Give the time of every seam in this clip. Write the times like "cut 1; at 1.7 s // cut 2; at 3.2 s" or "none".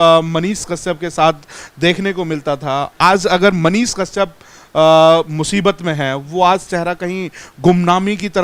none